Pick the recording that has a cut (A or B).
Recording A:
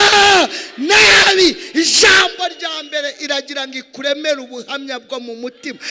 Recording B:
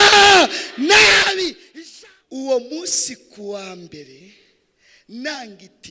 B